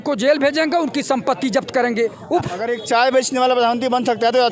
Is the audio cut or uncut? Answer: cut